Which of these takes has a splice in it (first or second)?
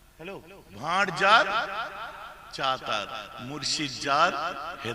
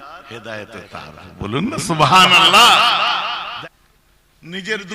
second